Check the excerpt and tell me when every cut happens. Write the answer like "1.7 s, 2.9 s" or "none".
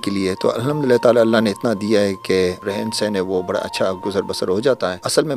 none